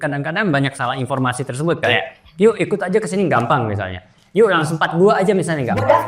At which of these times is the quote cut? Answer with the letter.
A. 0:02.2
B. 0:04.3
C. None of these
C